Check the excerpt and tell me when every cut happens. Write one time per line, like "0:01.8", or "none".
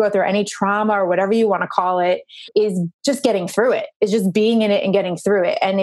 0:02.3